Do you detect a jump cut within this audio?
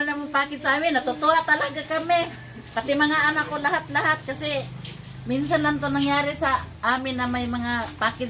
no; 0 cuts

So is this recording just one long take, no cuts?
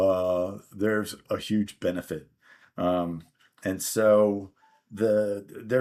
yes; 0 cuts

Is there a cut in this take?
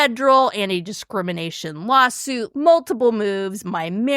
yes; 1 cut; at 2.5 s

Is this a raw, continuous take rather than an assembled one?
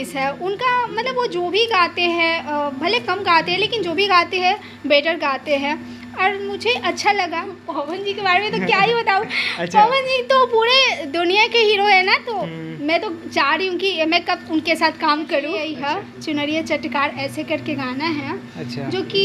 no; 2 cuts; at 7.7 s, 15.7 s

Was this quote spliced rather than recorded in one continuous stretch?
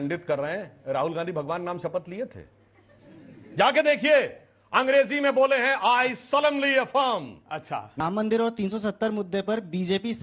yes; 1 cut; at 8.0 s

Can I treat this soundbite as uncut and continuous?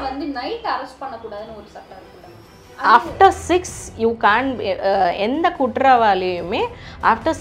yes; 0 cuts

